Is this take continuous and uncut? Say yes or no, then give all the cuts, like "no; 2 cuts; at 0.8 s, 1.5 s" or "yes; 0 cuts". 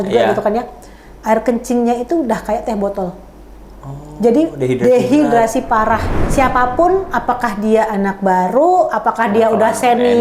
no; 1 cut; at 6.2 s